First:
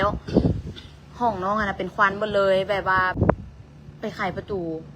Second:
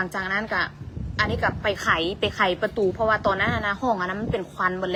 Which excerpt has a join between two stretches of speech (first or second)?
first